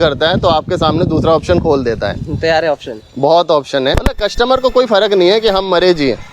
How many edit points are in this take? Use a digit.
1